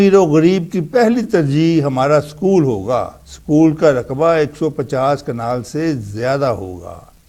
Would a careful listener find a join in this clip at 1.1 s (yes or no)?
yes